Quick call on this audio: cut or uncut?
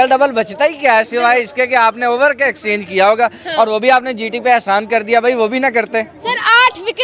uncut